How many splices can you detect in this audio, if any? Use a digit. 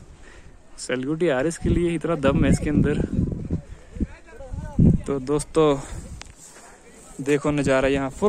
0